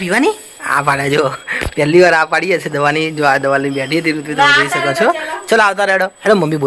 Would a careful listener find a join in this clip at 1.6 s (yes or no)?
no